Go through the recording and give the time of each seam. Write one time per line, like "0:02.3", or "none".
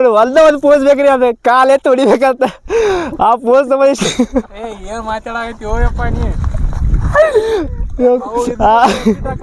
none